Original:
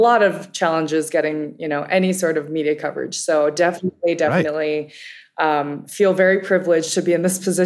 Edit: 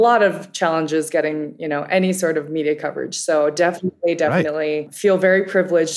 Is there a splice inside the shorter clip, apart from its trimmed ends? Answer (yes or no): yes